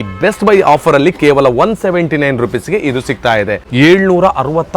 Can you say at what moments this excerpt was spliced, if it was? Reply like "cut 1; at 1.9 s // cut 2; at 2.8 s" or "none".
cut 1; at 3.6 s